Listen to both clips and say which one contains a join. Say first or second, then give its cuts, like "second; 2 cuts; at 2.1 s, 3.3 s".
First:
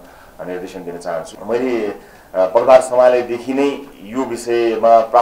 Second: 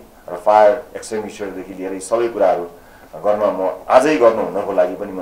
first; 1 cut; at 1.3 s